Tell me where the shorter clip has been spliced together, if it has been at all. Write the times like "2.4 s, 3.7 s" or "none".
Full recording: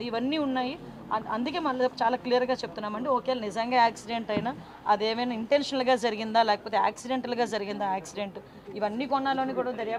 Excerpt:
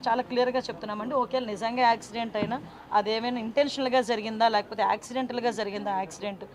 none